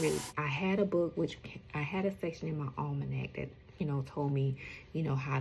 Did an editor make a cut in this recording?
no; 0 cuts

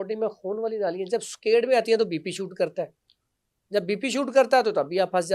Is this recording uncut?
yes; 0 cuts

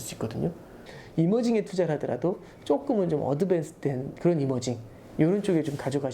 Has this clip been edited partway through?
yes; 1 cut; at 0.9 s

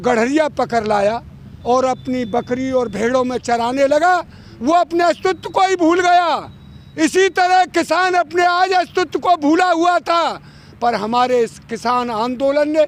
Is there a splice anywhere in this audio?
no; 0 cuts

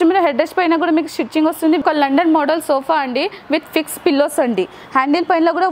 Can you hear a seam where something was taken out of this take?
yes; 2 cuts; at 1.8 s, 4.8 s

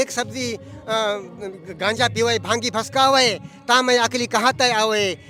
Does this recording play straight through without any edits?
yes; 0 cuts

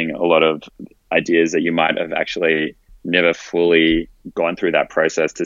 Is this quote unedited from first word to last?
no; 1 cut; at 4.2 s

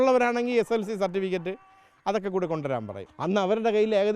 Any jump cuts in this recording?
yes; 1 cut; at 3.0 s

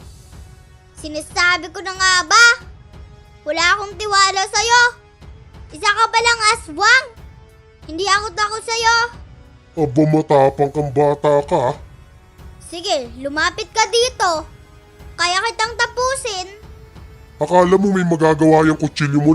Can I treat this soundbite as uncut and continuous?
no; 1 cut; at 1.0 s

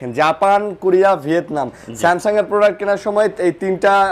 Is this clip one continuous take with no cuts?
yes; 0 cuts

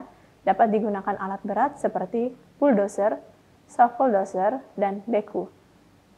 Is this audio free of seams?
yes; 0 cuts

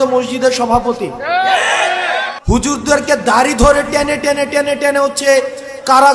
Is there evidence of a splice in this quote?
yes; 1 cut; at 2.3 s

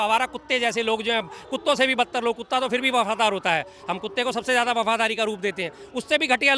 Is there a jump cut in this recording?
no; 0 cuts

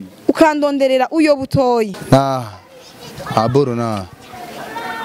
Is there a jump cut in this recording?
yes; 1 cut; at 2.0 s

